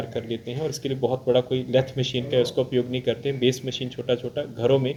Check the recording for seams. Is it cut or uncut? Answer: uncut